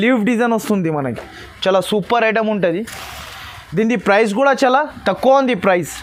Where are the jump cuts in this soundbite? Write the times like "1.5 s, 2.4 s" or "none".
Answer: none